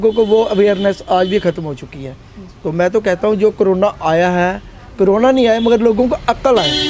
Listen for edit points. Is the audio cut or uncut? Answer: uncut